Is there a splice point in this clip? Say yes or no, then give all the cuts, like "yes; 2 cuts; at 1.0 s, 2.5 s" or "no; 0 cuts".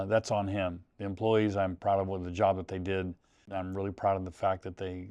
yes; 1 cut; at 3.5 s